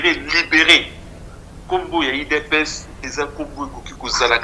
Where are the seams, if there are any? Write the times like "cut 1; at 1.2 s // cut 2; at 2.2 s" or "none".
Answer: none